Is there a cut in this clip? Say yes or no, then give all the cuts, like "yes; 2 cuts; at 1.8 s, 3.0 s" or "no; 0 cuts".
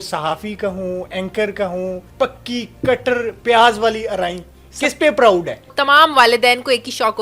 yes; 2 cuts; at 2.0 s, 5.7 s